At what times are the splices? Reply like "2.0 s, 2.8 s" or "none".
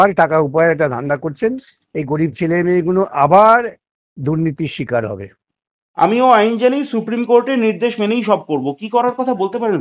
none